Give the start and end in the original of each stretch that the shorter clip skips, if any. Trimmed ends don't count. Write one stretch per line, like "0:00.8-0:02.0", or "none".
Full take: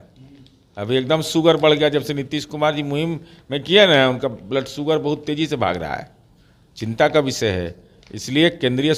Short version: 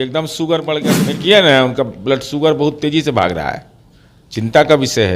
0:02.0-0:03.5